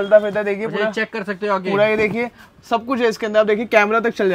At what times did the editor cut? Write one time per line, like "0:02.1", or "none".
none